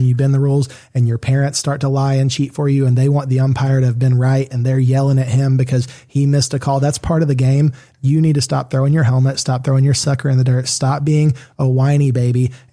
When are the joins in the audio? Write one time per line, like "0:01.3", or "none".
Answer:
none